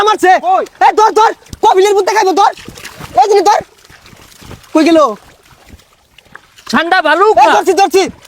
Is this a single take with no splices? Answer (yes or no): yes